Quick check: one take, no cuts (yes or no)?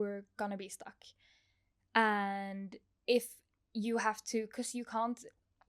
yes